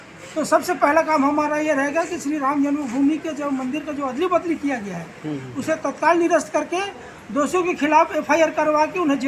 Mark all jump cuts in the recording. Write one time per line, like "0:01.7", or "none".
none